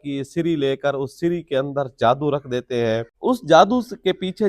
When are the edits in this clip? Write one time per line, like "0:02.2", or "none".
0:03.1